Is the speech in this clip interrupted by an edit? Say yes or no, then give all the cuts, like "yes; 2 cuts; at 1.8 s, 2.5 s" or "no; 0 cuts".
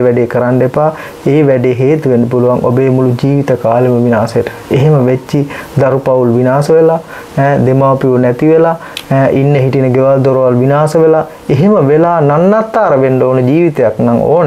no; 0 cuts